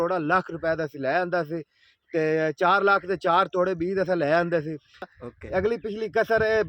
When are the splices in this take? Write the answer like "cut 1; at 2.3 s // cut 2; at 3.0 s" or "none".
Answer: cut 1; at 5.1 s